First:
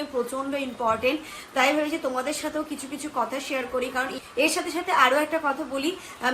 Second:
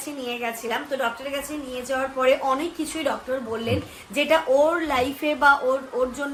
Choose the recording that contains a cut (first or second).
first